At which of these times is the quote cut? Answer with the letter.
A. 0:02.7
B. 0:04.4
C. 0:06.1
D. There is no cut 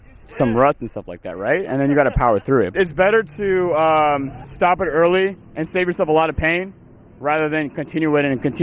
A